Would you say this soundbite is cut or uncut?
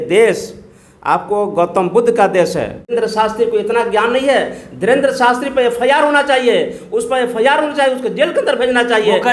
cut